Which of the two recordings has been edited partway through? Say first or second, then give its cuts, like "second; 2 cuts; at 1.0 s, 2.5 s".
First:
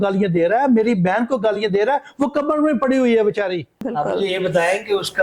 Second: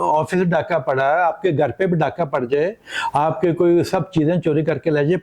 first; 1 cut; at 3.8 s